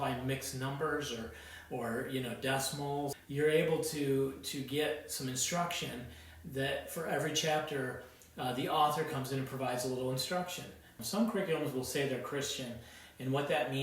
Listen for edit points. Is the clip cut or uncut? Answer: cut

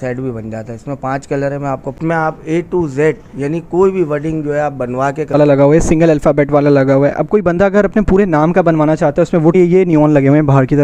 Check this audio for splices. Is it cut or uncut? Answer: cut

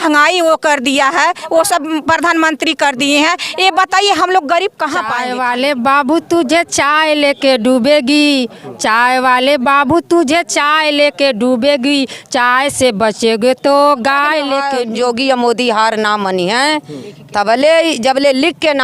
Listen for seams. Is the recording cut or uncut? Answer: cut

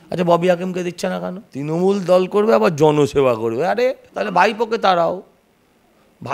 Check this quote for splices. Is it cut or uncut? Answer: cut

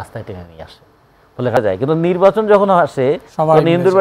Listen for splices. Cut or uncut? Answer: cut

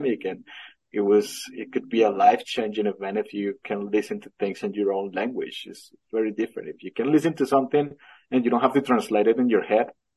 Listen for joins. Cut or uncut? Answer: uncut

